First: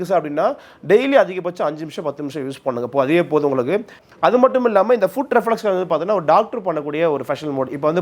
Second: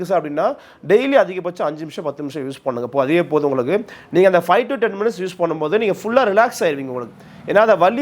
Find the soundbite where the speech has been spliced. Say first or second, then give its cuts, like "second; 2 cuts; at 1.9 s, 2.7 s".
first; 1 cut; at 4.0 s